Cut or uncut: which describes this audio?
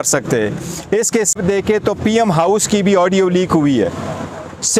cut